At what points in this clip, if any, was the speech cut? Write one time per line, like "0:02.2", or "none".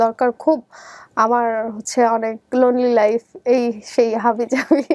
none